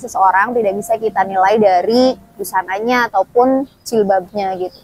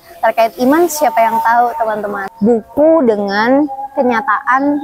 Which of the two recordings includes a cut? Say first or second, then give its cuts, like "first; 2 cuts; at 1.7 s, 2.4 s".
second; 1 cut; at 2.2 s